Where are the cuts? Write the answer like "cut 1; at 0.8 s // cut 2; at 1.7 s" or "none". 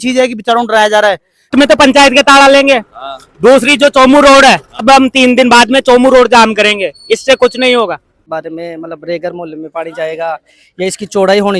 cut 1; at 1.5 s // cut 2; at 4.8 s // cut 3; at 8.3 s

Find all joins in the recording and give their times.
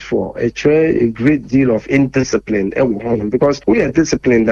cut 1; at 3.6 s

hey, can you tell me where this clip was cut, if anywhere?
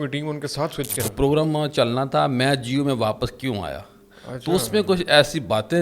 cut 1; at 1.0 s

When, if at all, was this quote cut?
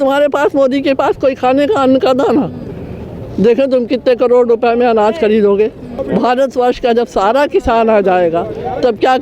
cut 1; at 5.9 s

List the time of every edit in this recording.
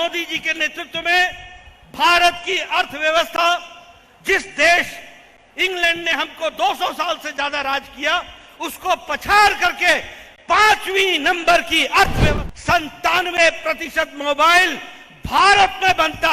cut 1; at 12.2 s

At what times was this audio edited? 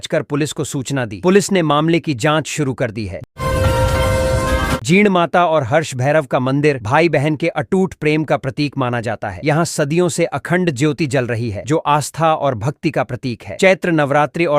none

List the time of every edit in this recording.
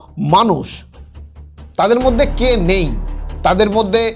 none

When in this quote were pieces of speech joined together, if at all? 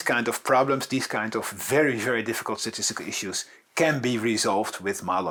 none

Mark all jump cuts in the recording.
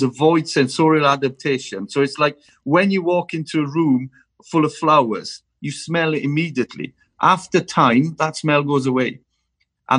none

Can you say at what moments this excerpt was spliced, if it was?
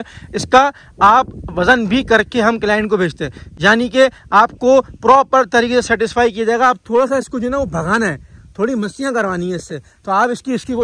none

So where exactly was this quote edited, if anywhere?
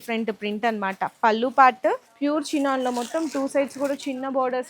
cut 1; at 2.1 s

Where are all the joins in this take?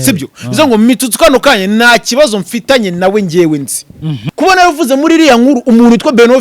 cut 1; at 4.3 s

